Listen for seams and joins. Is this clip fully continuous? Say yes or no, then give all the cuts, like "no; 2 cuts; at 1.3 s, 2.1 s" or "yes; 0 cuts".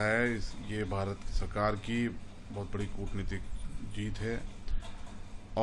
yes; 0 cuts